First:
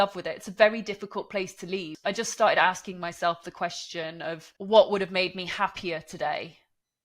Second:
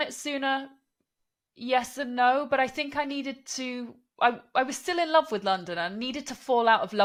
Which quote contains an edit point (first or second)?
first